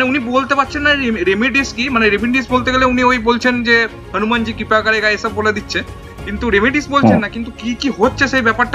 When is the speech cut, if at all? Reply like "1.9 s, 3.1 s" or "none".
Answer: none

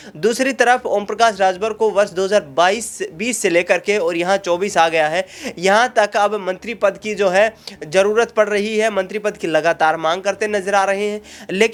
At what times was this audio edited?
none

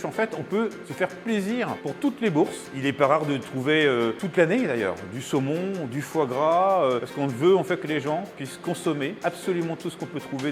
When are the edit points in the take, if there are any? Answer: 0.8 s, 1.8 s, 2.6 s, 4.2 s, 7.1 s, 9.2 s

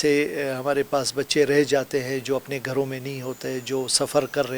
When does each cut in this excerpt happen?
none

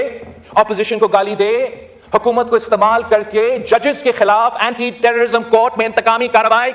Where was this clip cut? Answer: none

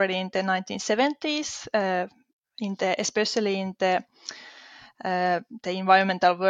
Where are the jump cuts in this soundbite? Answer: none

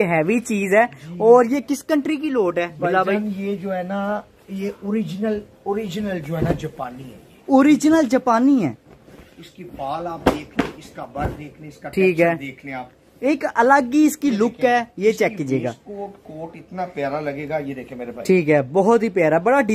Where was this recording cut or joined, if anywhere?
none

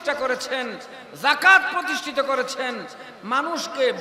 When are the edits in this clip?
none

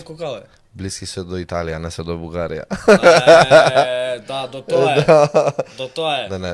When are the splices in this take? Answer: none

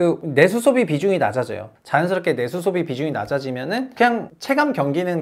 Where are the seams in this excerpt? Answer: 1.8 s, 3.9 s

